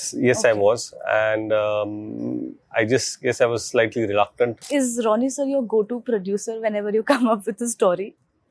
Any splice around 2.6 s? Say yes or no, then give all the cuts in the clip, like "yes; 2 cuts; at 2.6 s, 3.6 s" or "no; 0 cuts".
no; 1 cut; at 4.6 s